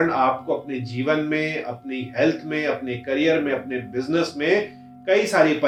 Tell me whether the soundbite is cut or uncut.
uncut